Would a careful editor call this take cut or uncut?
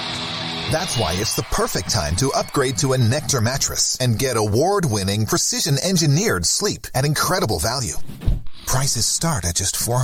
uncut